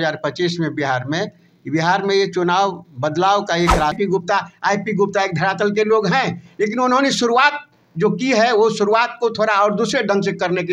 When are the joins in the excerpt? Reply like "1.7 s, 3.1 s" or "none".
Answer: 4.0 s